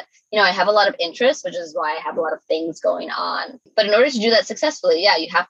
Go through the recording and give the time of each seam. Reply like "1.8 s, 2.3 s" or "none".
3.6 s